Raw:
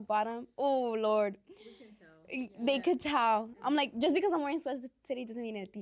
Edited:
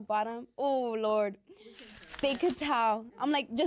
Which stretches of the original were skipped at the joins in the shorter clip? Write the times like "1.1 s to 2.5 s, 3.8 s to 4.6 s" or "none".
2.1 s to 2.6 s